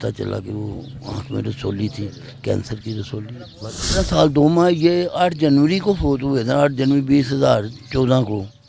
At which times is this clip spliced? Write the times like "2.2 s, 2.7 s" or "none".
4.1 s